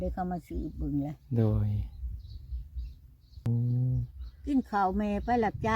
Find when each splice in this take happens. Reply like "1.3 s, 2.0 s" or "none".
3.5 s